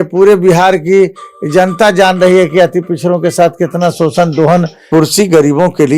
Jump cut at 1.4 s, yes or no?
no